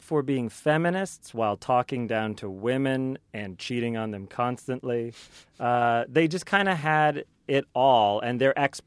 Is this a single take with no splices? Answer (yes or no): yes